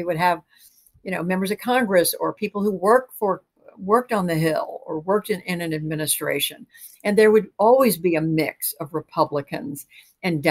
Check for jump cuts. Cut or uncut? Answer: uncut